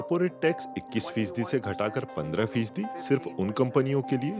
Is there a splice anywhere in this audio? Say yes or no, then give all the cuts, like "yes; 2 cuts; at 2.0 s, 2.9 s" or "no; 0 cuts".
no; 0 cuts